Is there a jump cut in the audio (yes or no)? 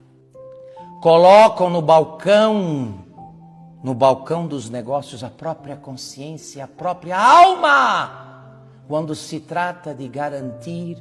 yes